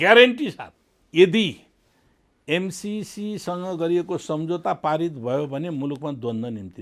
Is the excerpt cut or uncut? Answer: cut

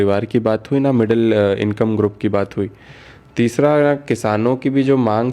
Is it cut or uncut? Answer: uncut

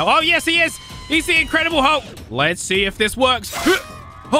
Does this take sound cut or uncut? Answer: cut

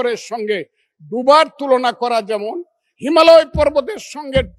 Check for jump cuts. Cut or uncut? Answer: uncut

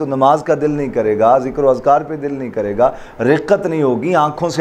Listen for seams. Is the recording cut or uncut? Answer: uncut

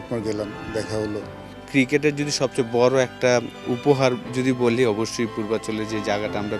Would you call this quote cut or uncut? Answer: cut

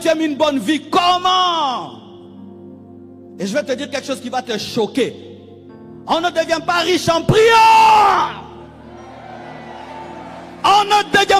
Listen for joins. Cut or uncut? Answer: uncut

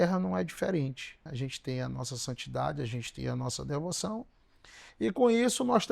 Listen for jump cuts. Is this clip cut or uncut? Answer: cut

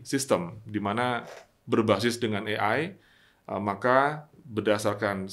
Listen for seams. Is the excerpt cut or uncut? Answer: uncut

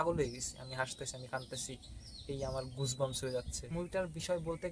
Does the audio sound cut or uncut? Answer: cut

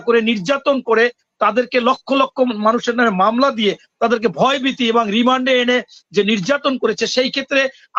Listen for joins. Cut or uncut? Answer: uncut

